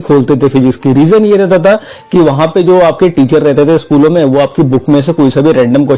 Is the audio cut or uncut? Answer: uncut